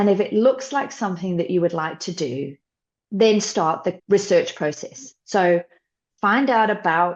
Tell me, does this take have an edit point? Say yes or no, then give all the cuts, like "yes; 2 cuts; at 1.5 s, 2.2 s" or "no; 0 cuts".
yes; 1 cut; at 3.9 s